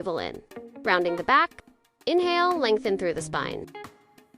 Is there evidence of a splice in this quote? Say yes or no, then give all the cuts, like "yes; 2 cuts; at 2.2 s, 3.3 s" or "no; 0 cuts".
no; 0 cuts